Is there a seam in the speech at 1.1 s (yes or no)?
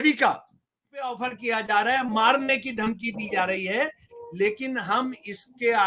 yes